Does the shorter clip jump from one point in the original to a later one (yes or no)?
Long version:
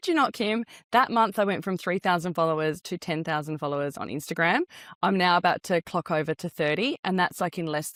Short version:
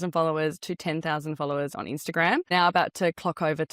yes